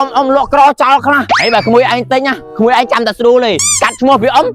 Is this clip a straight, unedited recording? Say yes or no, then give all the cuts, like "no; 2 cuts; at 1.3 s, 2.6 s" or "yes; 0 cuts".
no; 3 cuts; at 1.3 s, 2.4 s, 3.7 s